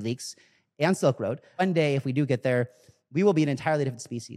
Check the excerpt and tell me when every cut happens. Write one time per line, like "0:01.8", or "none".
0:01.6